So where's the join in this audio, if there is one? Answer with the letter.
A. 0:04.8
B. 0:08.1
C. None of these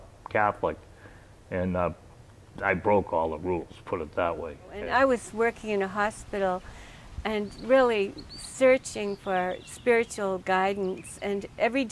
A